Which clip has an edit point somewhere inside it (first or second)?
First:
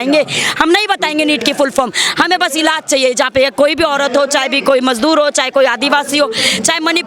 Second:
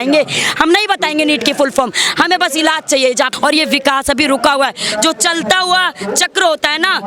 second